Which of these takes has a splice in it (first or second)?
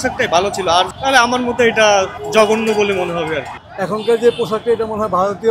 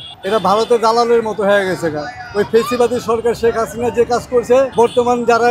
first